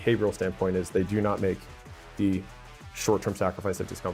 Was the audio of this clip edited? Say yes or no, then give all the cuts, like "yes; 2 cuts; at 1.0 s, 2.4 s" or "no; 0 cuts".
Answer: no; 0 cuts